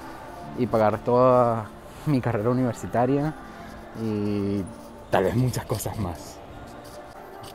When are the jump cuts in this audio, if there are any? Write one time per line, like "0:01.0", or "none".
none